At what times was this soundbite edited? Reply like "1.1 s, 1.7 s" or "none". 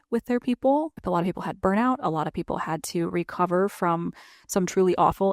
1.0 s